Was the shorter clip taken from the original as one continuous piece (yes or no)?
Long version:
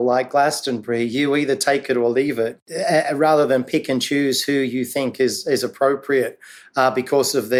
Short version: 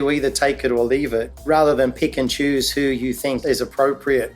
no